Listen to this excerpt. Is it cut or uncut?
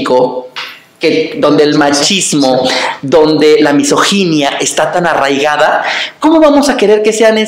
uncut